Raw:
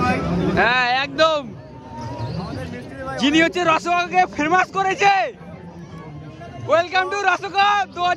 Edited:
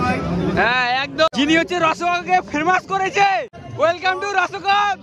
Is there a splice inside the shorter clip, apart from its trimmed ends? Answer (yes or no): yes